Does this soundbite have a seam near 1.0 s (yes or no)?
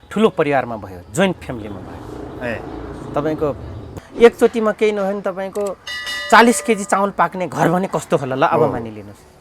no